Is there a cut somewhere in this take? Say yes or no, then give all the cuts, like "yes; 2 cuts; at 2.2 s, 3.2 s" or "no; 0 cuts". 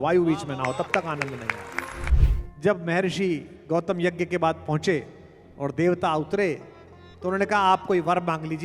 yes; 1 cut; at 2.1 s